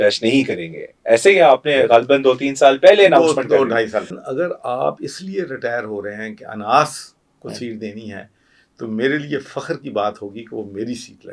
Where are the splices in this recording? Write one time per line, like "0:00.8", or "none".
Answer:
0:04.1